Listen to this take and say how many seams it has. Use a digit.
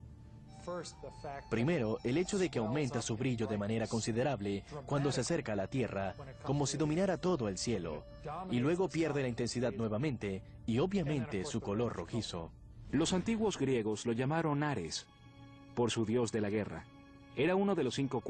1